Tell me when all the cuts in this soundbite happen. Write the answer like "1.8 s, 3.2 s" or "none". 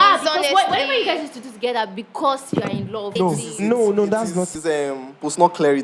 3.1 s, 4.5 s